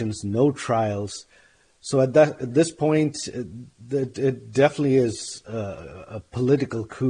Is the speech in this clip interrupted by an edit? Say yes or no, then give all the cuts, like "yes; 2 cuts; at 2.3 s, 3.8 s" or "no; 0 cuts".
no; 0 cuts